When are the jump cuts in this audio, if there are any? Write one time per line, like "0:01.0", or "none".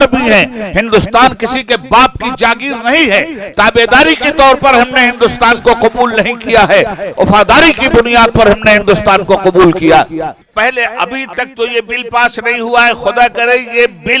0:10.5

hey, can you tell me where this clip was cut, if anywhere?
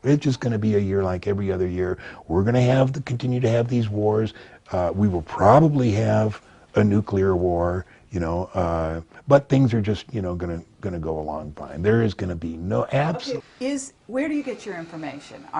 none

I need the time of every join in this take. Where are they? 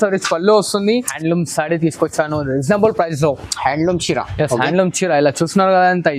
0:01.1

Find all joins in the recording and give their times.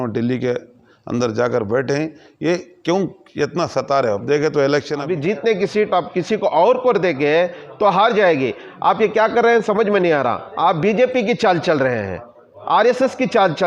0:05.0

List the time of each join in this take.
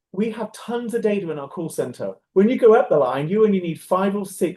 0:02.2

